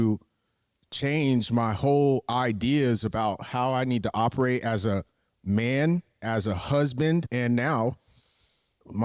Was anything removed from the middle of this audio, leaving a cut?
yes; 1 cut; at 7.3 s

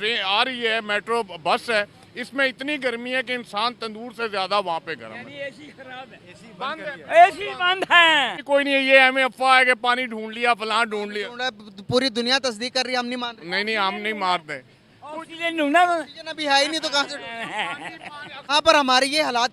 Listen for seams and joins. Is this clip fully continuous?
no; 2 cuts; at 8.4 s, 18.4 s

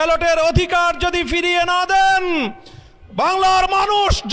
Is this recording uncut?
yes; 0 cuts

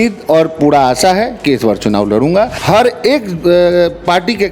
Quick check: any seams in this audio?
yes; 1 cut; at 2.6 s

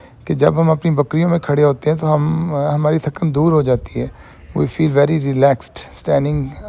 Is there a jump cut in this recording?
no; 0 cuts

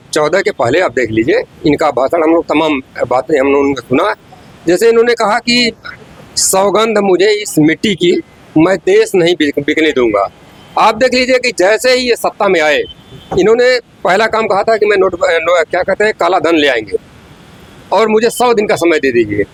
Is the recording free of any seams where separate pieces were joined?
yes; 0 cuts

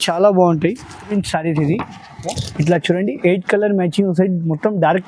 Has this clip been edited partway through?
yes; 1 cut; at 1.1 s

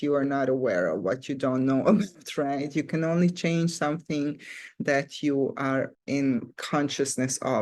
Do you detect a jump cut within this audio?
no; 0 cuts

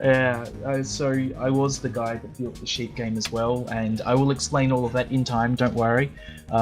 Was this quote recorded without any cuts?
no; 1 cut; at 4.6 s

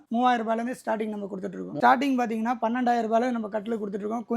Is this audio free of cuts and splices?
no; 1 cut; at 1.7 s

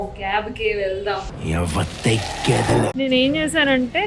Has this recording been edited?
yes; 1 cut; at 2.9 s

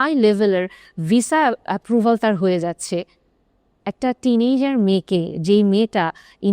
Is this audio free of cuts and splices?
yes; 0 cuts

